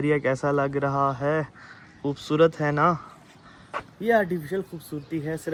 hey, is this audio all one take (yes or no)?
yes